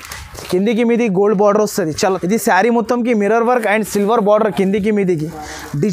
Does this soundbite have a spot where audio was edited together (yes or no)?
yes